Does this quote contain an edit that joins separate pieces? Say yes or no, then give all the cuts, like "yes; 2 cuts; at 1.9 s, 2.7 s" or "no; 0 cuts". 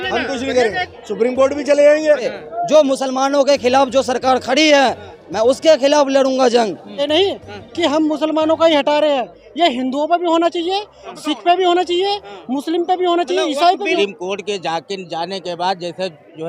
yes; 3 cuts; at 2.3 s, 7.0 s, 14.0 s